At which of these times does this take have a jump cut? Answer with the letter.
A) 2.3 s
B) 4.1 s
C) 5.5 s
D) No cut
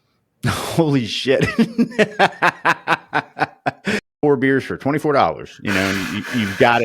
B